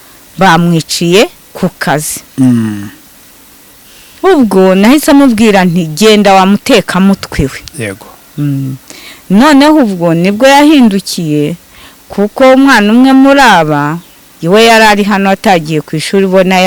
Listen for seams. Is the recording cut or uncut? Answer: uncut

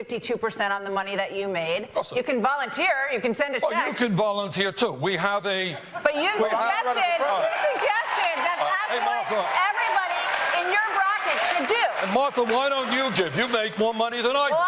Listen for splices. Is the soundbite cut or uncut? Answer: uncut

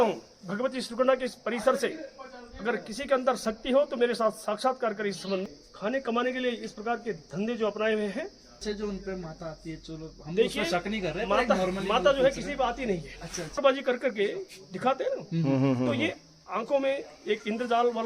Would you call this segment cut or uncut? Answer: cut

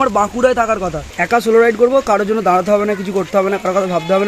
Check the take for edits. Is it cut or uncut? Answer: cut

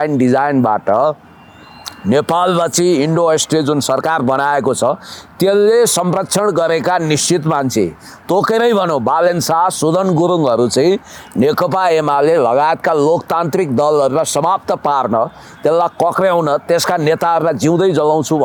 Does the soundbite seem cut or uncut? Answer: uncut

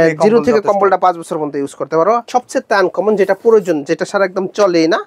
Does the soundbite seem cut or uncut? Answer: cut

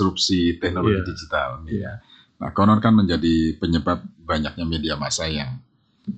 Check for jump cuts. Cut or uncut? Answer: uncut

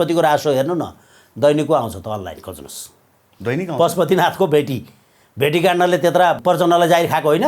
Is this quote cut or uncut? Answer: cut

